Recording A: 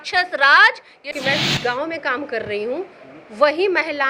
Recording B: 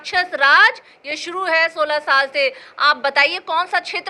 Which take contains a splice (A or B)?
A